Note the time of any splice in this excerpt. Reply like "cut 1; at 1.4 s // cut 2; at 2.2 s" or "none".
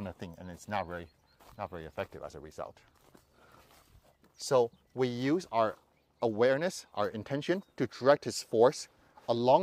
none